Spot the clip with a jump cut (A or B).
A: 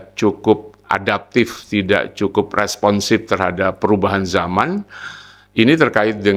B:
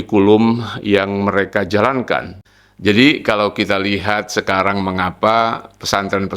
B